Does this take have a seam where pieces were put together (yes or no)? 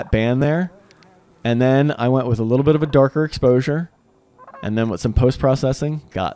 no